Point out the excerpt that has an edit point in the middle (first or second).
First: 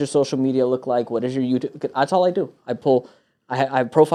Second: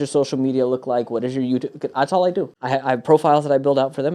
second